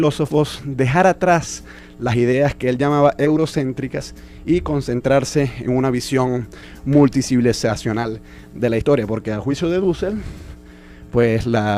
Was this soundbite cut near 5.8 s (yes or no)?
yes